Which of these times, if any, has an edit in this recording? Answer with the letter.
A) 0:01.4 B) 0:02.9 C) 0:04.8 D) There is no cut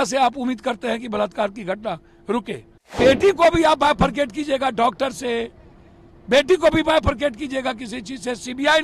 B